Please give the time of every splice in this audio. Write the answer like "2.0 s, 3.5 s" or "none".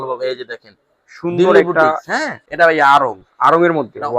2.5 s